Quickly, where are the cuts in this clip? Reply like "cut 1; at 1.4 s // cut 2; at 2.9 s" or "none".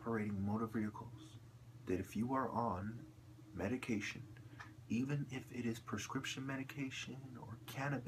none